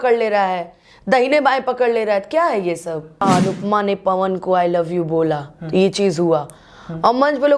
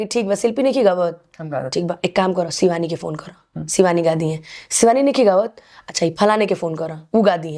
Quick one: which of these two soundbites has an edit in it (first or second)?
first